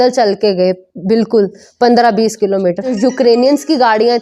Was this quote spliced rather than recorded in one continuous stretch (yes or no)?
yes